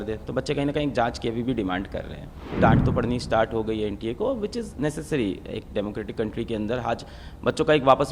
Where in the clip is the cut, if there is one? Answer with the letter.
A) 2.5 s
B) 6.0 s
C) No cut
A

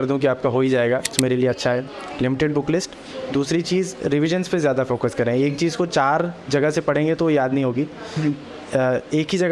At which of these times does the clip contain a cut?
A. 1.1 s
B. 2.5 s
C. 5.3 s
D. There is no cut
A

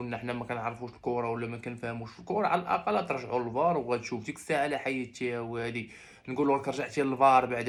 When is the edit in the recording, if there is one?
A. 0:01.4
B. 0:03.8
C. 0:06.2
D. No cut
D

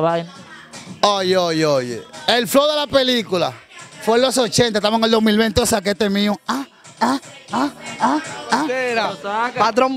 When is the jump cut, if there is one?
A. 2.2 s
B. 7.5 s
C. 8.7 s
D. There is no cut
C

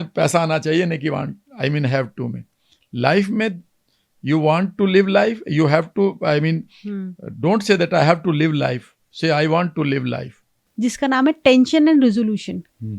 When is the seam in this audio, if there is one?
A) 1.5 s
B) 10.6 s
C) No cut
B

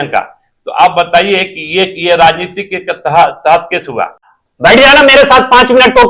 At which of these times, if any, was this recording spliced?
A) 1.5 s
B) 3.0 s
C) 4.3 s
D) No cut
C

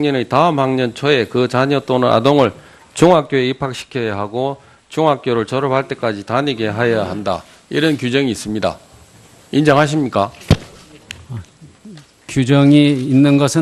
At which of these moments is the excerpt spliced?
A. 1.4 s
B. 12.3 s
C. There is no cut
C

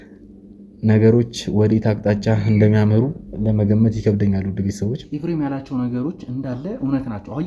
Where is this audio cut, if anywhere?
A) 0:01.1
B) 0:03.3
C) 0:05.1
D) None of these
C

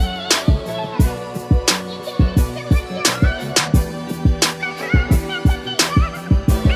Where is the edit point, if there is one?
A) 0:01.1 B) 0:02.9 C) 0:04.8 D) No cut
D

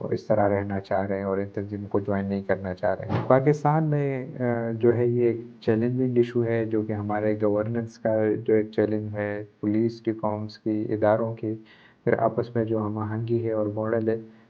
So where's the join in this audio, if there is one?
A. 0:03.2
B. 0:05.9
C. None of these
A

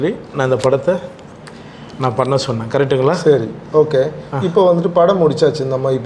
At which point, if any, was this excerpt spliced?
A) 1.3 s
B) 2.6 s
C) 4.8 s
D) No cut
D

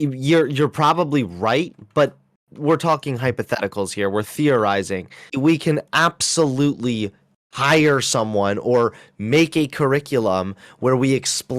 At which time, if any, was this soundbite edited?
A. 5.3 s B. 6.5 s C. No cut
A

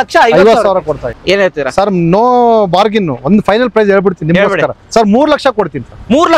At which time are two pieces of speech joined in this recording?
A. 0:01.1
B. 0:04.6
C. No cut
A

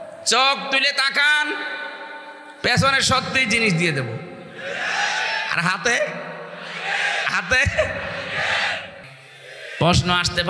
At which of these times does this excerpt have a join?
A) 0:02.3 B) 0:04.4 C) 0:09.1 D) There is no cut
C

